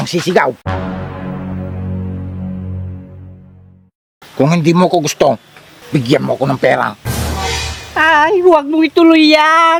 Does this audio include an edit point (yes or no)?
no